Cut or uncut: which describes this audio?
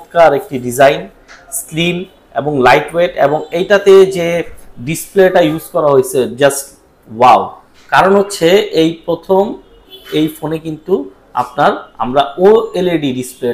uncut